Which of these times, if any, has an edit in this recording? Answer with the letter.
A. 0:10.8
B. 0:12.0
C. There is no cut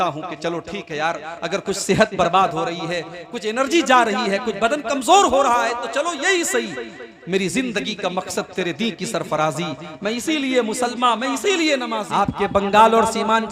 B